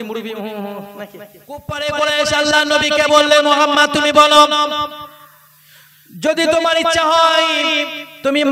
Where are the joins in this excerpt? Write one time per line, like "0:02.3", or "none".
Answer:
0:01.7